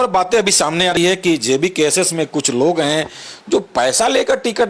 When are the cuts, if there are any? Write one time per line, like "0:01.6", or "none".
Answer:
0:01.0